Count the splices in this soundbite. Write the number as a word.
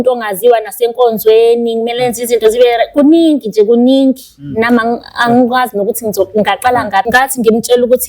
one